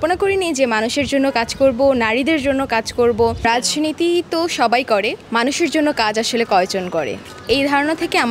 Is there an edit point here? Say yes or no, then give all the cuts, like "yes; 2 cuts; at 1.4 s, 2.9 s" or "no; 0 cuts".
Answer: yes; 2 cuts; at 3.4 s, 5.2 s